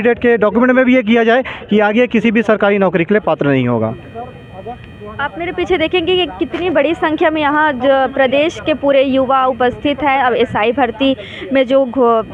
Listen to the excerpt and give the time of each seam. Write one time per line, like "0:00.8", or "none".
none